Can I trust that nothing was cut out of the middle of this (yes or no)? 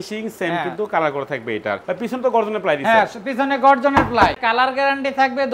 no